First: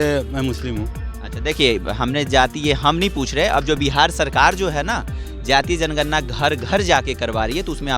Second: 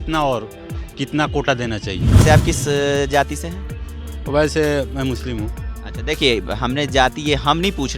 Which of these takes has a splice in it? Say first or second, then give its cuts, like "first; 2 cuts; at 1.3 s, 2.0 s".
second; 1 cut; at 2.2 s